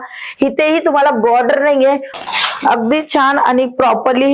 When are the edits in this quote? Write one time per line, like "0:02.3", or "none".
0:02.1